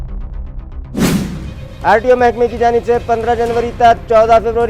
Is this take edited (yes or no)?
yes